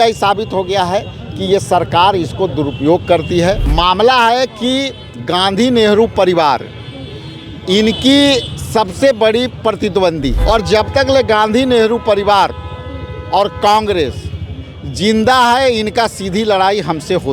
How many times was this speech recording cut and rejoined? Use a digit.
2